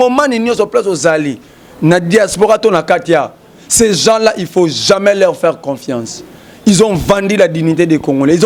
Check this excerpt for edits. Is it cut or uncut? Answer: uncut